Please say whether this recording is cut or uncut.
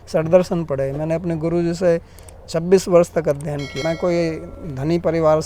cut